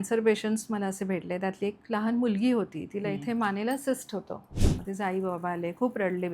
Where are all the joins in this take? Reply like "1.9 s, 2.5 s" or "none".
4.6 s

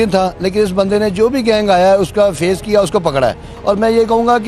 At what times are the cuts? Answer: 3.5 s

